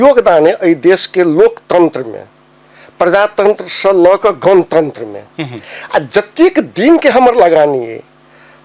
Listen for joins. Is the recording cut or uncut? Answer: uncut